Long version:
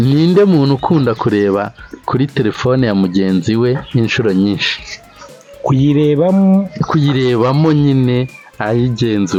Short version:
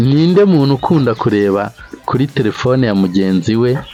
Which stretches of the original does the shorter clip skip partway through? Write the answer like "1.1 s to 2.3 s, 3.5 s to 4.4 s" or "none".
none